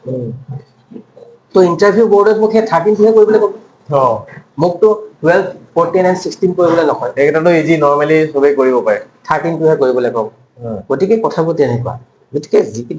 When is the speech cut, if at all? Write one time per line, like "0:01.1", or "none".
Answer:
none